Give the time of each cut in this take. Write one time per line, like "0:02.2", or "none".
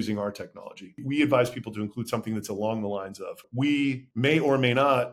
0:00.9
0:03.5
0:04.1

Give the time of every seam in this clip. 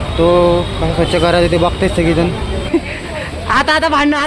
0:02.7

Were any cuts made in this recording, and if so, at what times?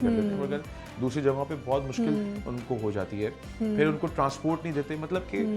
none

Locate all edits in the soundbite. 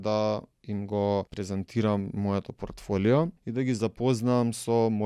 0:01.4
0:03.4

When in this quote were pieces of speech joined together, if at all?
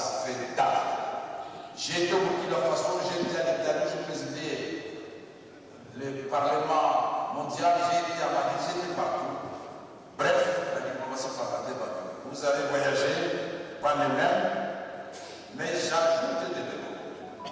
none

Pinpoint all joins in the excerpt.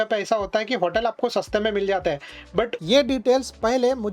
0:02.8

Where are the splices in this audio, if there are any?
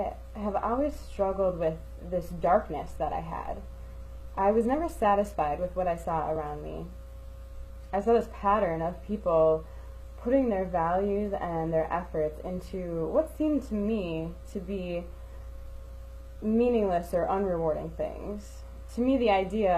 0:05.7

